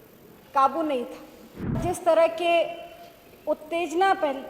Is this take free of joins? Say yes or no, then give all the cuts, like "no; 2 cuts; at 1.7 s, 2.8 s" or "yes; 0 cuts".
no; 1 cut; at 1.7 s